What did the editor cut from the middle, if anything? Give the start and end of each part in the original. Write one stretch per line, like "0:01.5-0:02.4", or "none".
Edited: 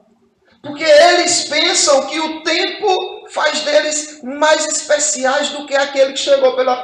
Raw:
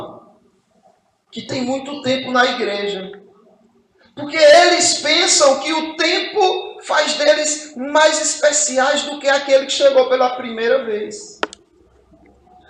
none